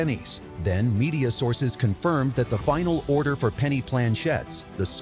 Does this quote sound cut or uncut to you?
uncut